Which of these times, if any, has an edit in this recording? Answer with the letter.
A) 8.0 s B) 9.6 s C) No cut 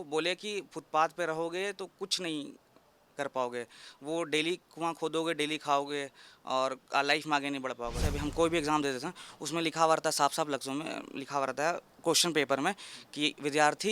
A